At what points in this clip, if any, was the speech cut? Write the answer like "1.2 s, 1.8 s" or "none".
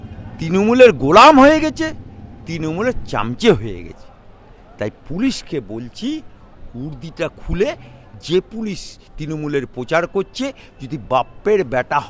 none